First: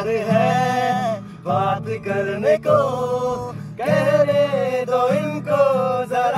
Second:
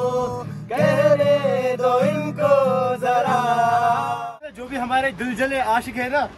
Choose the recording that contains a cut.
second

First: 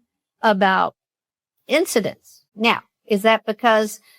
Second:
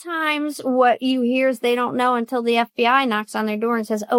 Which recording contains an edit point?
first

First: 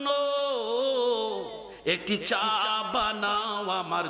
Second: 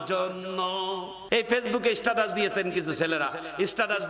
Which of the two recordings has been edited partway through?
second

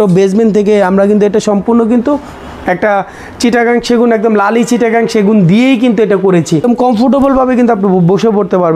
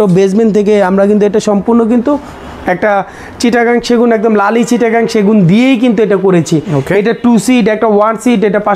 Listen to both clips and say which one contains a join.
first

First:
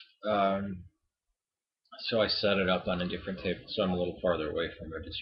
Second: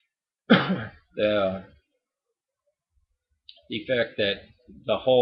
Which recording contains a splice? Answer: second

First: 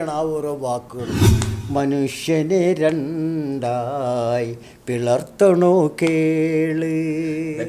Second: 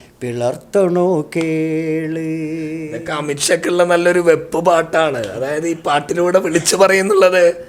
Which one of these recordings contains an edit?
first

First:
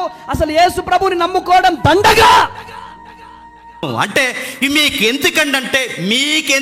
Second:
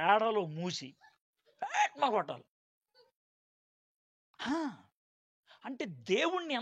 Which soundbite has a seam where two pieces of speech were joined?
first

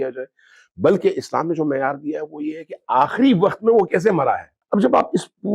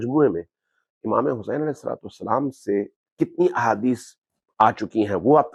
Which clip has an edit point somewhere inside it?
first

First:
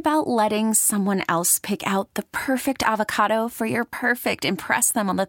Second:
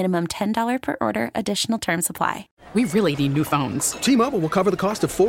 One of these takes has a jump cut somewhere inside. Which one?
second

